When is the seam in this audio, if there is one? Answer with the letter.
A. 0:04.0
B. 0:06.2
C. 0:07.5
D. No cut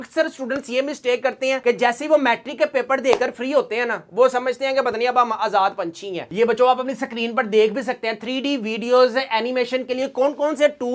B